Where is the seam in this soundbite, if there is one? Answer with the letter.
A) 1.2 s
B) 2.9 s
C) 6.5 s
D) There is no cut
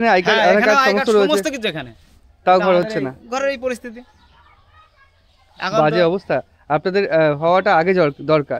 D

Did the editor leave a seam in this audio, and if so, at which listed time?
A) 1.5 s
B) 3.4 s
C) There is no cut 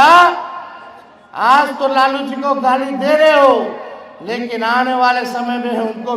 C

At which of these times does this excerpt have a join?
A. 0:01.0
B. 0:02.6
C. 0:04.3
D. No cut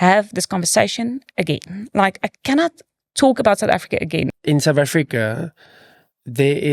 C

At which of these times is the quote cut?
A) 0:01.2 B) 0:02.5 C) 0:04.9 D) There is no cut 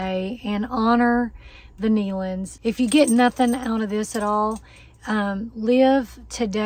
B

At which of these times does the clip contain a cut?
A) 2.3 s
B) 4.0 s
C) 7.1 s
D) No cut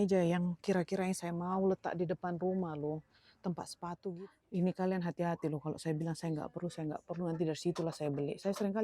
B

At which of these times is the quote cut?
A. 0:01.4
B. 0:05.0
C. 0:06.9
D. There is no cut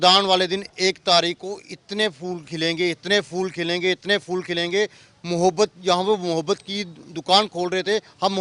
D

